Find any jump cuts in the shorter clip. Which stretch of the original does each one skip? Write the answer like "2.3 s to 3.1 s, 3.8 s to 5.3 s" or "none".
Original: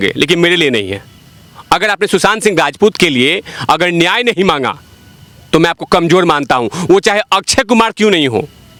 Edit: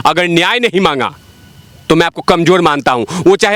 none

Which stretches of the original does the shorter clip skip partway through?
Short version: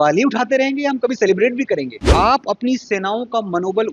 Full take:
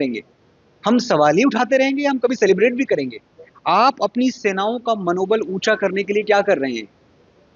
3.2 s to 3.5 s

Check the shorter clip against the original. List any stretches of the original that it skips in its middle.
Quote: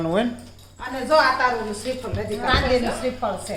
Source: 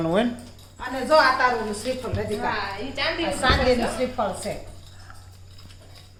2.4 s to 3.4 s

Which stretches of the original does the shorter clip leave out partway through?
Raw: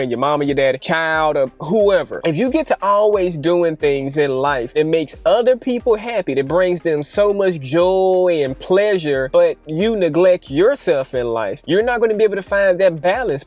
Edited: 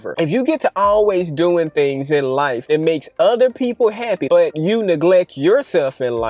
6.5 s to 9.5 s

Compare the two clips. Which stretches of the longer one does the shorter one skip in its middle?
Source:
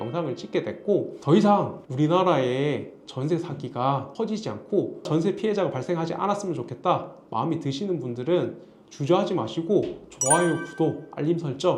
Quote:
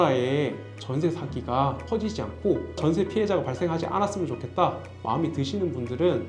none

